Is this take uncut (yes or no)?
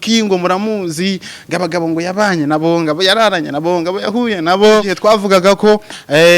no